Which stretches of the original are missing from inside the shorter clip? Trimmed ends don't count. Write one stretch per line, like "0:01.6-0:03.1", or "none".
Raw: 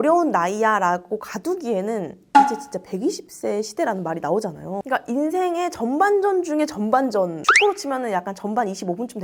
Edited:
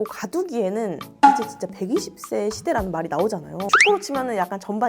0:04.8-0:07.4